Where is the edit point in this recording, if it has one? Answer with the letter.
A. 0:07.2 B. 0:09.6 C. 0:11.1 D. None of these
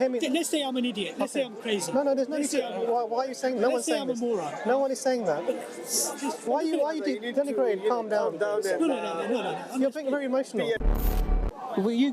C